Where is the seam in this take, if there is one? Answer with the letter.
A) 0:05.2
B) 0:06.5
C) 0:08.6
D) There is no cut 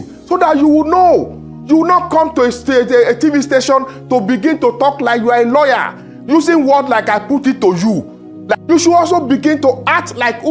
C